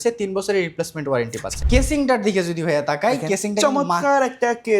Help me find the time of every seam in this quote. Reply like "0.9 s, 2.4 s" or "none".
1.5 s